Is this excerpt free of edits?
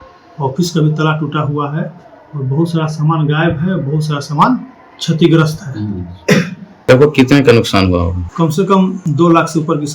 no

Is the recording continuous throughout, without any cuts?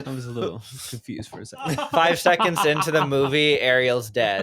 no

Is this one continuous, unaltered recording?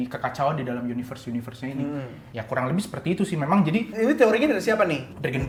yes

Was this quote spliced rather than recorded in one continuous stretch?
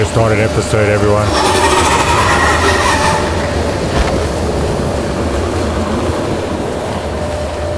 no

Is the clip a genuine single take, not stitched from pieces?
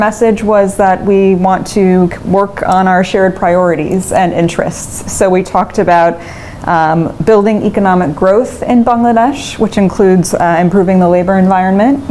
yes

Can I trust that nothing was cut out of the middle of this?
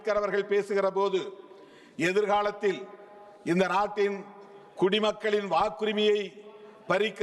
yes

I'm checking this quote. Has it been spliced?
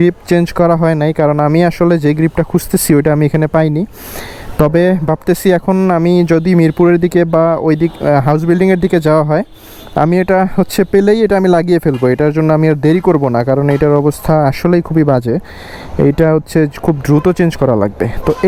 no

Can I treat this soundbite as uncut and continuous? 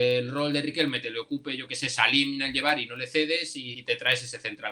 no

